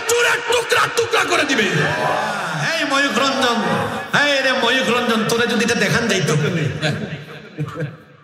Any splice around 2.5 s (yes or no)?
yes